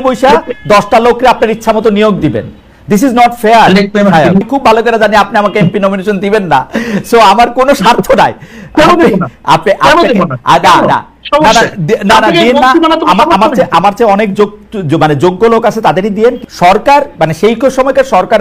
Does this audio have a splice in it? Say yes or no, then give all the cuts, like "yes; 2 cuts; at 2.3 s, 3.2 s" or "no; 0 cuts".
yes; 2 cuts; at 4.5 s, 16.4 s